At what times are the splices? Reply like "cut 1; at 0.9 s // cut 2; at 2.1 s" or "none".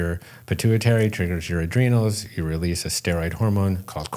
none